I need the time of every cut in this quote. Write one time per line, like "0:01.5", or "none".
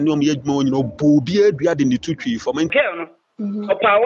0:02.7